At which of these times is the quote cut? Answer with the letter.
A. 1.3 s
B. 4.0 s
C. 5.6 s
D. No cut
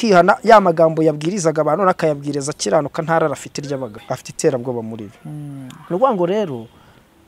B